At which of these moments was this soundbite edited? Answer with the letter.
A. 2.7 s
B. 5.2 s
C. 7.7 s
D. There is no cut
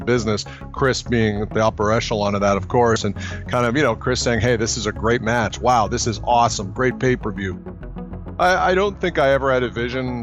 C